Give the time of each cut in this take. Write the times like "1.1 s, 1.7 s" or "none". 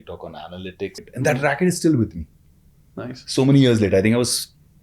1.0 s